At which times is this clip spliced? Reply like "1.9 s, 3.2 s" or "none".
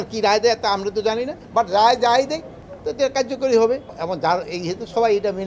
1.4 s, 3.9 s